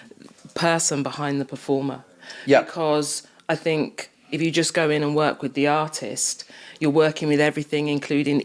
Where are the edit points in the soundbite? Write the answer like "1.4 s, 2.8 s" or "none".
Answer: none